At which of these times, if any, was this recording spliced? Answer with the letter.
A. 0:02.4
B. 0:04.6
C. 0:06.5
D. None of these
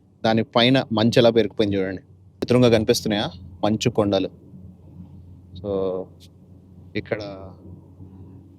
A